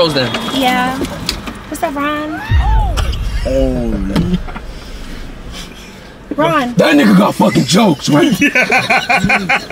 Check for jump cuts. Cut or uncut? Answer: uncut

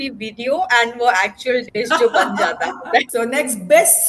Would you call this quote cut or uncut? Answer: cut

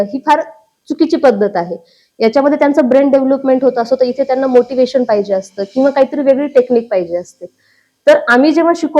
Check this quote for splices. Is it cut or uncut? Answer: uncut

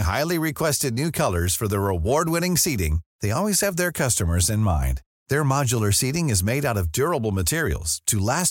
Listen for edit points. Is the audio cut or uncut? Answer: uncut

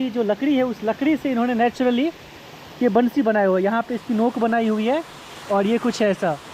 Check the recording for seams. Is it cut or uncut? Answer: uncut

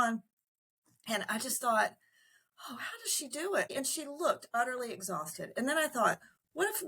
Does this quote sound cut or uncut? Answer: cut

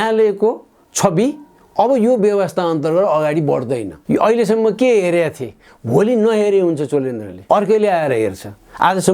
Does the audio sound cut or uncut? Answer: cut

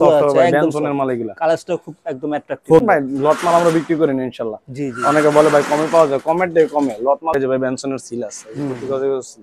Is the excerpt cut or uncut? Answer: cut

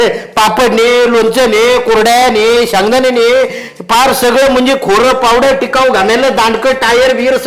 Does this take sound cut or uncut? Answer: uncut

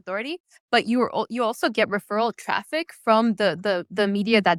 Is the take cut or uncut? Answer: uncut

